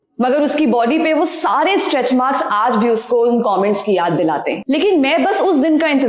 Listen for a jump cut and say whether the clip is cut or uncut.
cut